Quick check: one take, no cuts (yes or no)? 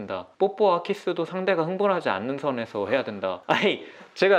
no